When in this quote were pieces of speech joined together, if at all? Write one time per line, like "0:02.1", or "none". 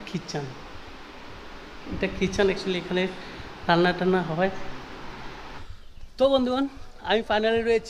0:05.6